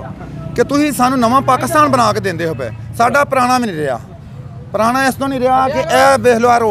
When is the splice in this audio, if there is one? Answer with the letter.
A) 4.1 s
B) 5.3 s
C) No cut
C